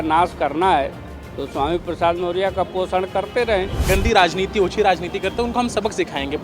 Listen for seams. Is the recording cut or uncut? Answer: cut